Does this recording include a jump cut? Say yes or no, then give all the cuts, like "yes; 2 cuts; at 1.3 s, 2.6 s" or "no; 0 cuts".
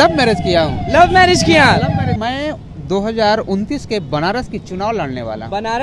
yes; 1 cut; at 2.1 s